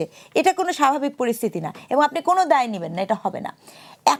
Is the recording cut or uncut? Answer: uncut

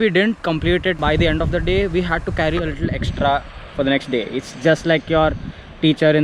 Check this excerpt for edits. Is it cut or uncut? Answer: cut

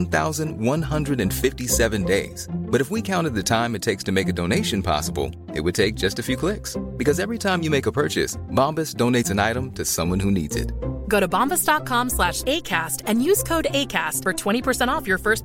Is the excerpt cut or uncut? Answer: uncut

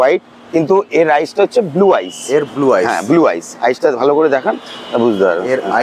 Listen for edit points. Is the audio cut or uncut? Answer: uncut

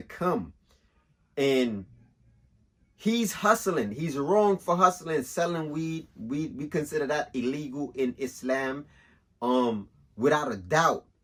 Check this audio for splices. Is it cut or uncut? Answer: uncut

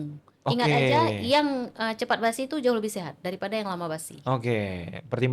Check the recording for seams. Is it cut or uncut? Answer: uncut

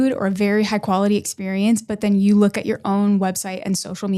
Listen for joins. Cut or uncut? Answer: uncut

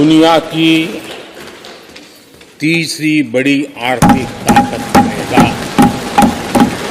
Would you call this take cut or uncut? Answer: uncut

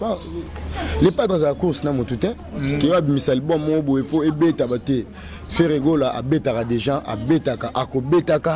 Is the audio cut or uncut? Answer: uncut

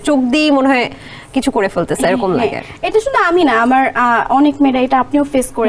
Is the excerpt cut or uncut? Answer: uncut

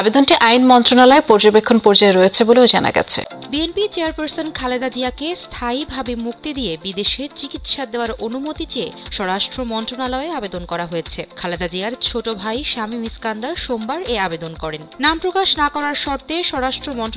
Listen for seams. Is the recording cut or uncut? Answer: cut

